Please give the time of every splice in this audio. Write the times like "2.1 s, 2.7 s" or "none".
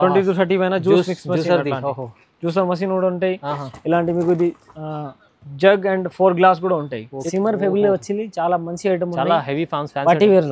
7.2 s